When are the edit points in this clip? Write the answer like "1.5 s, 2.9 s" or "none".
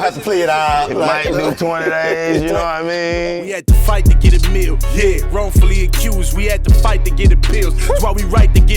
3.2 s

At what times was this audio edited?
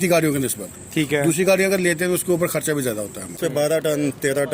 3.4 s

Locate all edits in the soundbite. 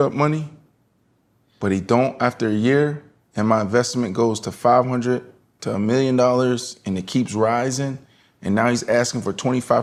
none

